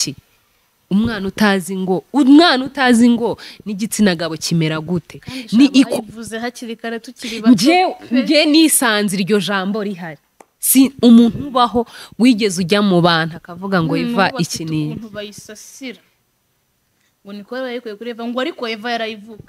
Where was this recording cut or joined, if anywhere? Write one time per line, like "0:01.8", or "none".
none